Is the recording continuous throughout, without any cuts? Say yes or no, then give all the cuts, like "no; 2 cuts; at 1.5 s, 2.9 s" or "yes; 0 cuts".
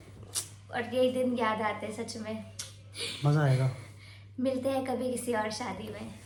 yes; 0 cuts